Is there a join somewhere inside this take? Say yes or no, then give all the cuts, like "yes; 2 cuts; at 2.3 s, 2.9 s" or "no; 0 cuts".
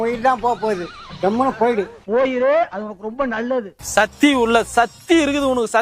yes; 2 cuts; at 0.8 s, 3.8 s